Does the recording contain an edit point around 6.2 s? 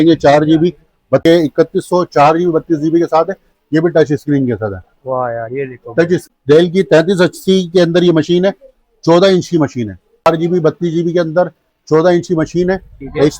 yes; 3 cuts; at 1.2 s, 6.2 s, 10.3 s

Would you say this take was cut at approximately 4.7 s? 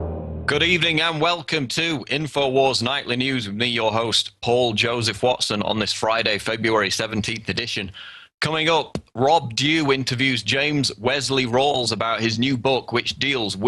yes; 1 cut; at 4.7 s

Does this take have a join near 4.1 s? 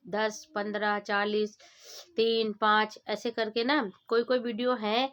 no; 0 cuts

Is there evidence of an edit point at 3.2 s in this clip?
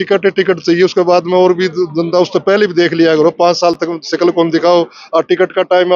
no; 0 cuts

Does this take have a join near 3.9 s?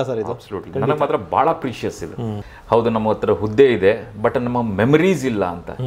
no; 1 cut; at 2.5 s

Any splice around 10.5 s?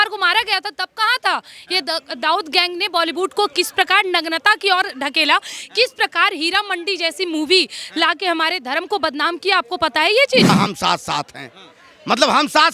yes; 1 cut; at 10.5 s

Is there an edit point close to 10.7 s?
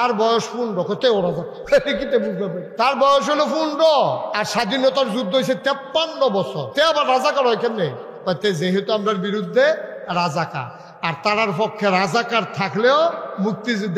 no; 4 cuts; at 1.5 s, 2.6 s, 4.3 s, 6.6 s

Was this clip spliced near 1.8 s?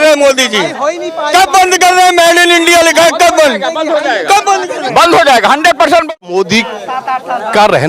no; 1 cut; at 6.2 s

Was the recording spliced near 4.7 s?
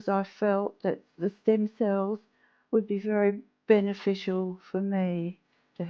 no; 1 cut; at 1.1 s

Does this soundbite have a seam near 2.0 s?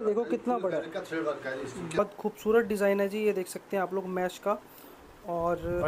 yes; 1 cut; at 2.0 s

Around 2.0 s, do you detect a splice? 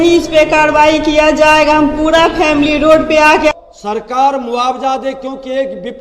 no; 1 cut; at 3.5 s

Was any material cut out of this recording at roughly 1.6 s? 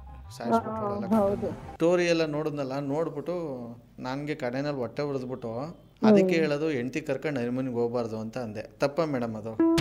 yes; 1 cut; at 1.6 s

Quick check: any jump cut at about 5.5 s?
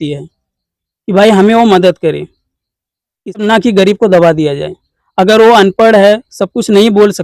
no; 1 cut; at 3.4 s

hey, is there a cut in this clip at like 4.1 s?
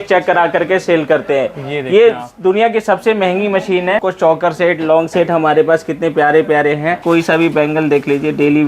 yes; 2 cuts; at 4.1 s, 7.0 s

